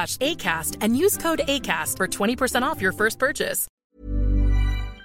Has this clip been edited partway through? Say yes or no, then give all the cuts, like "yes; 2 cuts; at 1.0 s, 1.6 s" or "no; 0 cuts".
yes; 1 cut; at 3.6 s